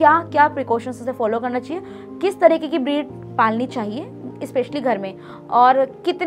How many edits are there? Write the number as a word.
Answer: zero